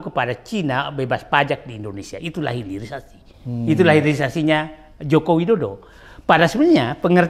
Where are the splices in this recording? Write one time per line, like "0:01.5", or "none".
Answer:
none